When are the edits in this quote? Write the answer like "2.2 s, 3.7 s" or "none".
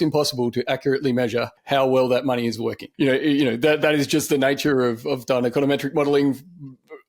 1.6 s, 2.8 s

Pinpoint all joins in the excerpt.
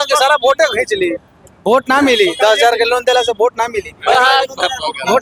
none

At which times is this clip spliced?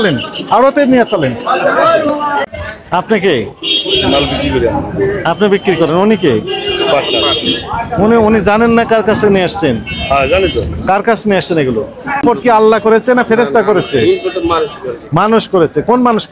2.5 s, 12.2 s

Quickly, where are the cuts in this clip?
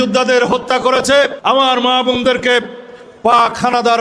1.4 s

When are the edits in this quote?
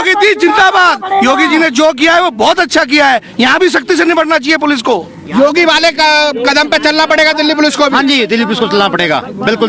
none

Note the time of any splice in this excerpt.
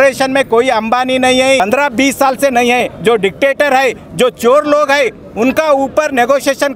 1.6 s

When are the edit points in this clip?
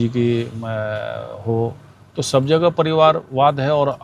none

